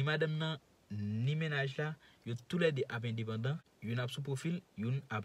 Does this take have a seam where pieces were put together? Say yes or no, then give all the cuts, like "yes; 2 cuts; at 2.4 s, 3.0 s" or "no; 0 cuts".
yes; 1 cut; at 3.7 s